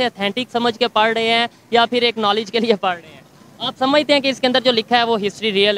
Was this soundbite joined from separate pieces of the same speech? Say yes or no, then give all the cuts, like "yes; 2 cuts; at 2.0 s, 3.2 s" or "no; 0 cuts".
no; 0 cuts